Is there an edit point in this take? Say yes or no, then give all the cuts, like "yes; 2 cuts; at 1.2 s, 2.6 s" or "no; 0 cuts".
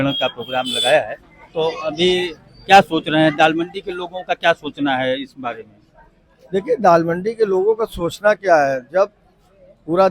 no; 0 cuts